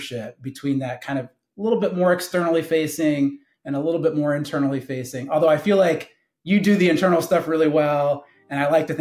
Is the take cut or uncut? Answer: uncut